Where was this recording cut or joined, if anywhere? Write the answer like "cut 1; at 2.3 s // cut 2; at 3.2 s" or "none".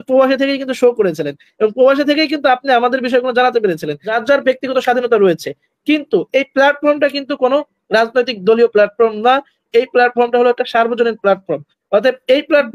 cut 1; at 4.1 s